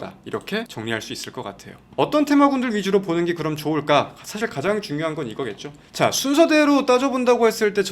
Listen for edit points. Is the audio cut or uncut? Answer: cut